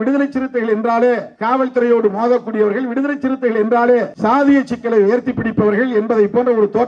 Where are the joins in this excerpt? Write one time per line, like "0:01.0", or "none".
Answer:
0:01.3
0:04.1